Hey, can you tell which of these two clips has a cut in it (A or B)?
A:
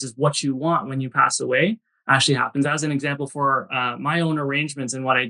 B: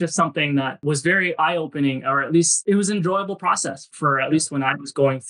B